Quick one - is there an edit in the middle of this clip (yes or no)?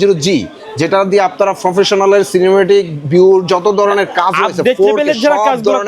no